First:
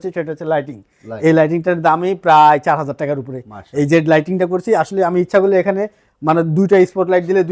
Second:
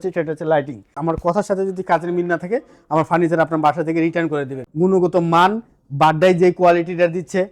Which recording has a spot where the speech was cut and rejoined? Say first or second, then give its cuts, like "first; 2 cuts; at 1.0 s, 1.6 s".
second; 2 cuts; at 1.0 s, 4.6 s